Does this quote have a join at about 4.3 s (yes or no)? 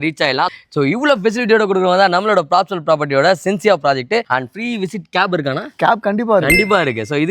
yes